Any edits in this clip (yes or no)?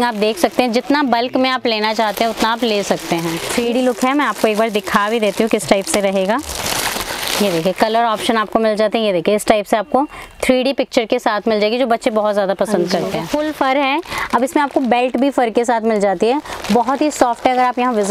yes